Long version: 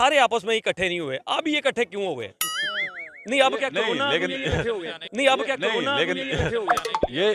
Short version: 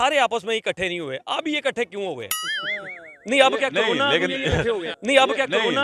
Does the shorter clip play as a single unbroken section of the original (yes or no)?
no